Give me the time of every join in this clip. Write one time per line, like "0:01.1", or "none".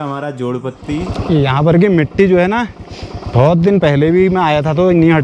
0:01.1